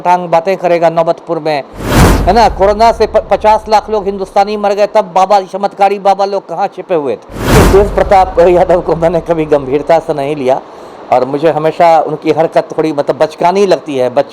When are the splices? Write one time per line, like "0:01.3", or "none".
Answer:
0:02.1
0:07.6